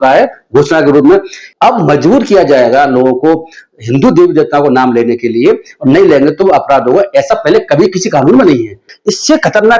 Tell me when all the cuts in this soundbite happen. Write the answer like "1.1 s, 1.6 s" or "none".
1.4 s, 8.9 s